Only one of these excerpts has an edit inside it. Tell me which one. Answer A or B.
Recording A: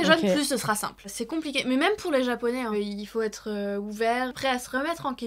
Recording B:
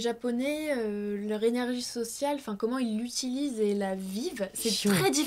A